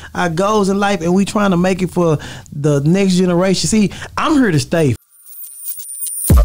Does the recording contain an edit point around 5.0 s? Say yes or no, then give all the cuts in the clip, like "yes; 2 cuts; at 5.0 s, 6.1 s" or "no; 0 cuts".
yes; 1 cut; at 5.0 s